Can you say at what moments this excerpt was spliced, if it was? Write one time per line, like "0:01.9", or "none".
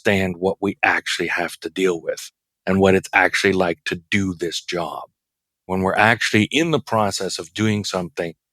0:05.7

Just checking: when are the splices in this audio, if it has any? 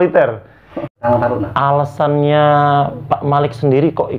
0:01.0

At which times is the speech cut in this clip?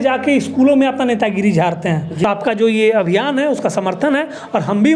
0:02.1

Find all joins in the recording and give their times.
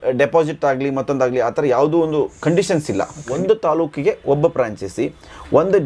0:03.3

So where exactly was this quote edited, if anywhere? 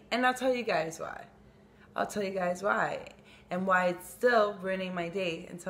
none

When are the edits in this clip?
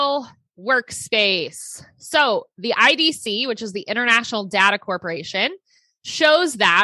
none

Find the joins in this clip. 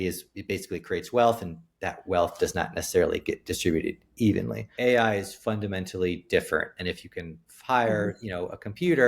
0:04.7

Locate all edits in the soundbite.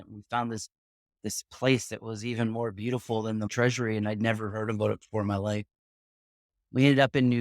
0:03.5

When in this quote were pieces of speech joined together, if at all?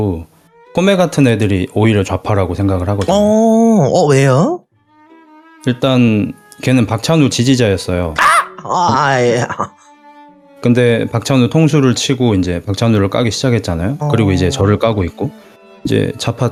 none

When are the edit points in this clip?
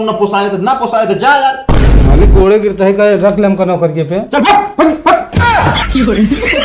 0:05.3

